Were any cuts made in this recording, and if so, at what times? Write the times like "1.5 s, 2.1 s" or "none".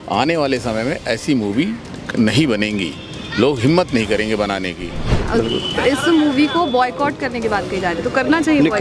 5.2 s